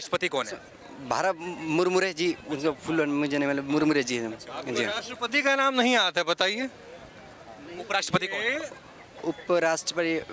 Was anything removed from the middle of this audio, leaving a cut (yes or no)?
no